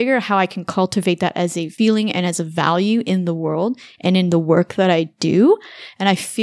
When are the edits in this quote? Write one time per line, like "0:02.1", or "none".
0:01.7